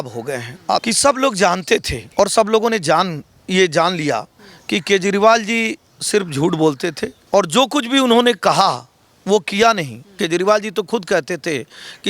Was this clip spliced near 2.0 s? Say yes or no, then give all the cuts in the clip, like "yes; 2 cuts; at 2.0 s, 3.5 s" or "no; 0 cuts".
yes; 4 cuts; at 0.8 s, 2.0 s, 7.1 s, 10.1 s